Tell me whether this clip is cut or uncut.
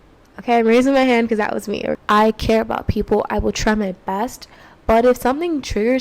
cut